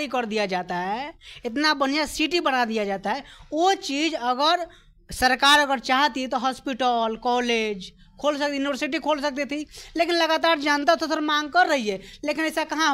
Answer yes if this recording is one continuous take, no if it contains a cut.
no